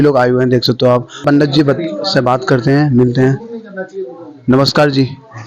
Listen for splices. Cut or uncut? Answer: cut